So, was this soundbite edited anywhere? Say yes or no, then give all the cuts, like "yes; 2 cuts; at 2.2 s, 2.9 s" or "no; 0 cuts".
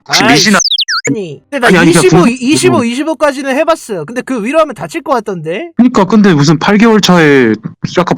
no; 0 cuts